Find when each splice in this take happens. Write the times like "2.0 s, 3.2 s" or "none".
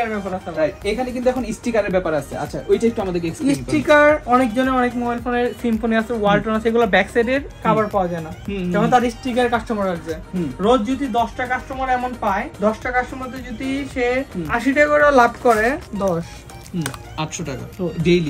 none